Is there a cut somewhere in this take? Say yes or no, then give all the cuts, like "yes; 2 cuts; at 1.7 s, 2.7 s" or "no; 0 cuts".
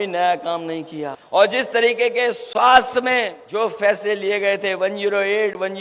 yes; 2 cuts; at 1.2 s, 3.4 s